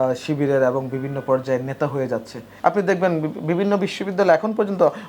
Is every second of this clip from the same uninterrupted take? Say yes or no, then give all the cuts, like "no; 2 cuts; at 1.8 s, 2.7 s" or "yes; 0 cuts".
no; 1 cut; at 2.5 s